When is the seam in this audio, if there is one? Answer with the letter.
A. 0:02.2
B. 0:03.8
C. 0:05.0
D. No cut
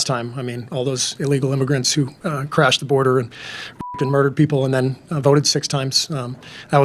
D